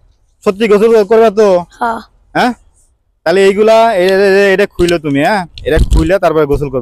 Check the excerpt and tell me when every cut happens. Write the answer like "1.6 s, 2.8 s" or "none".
none